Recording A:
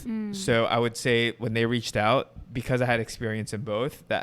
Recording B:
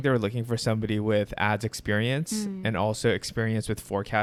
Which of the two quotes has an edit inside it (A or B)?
A